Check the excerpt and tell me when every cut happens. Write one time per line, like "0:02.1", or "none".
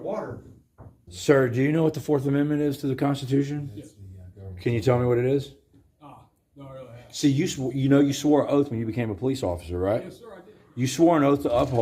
0:01.1